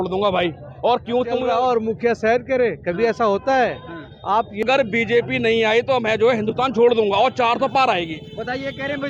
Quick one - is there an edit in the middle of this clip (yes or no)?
yes